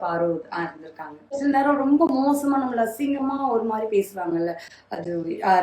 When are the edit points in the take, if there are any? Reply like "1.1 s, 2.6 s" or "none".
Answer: 1.4 s